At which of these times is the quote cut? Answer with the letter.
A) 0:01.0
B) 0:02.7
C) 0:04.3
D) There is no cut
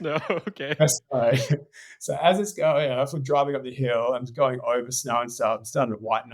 D